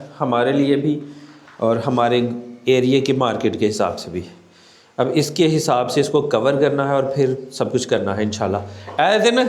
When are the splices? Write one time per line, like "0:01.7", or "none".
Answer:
none